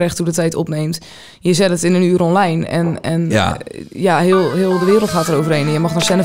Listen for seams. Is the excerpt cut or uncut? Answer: uncut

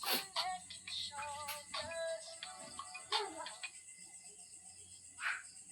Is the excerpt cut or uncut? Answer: uncut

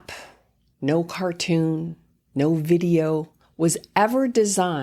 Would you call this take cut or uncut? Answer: uncut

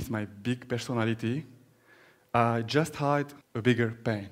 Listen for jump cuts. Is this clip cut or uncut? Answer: cut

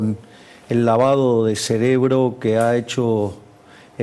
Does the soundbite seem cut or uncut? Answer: uncut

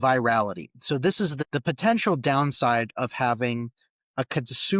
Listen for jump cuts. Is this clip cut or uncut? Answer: uncut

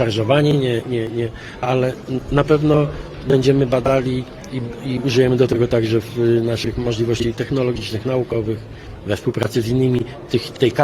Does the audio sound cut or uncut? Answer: uncut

